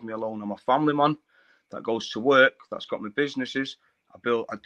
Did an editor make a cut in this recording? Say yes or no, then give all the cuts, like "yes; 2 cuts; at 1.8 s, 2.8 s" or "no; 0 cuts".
no; 0 cuts